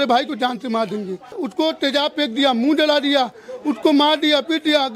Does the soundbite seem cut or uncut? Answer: cut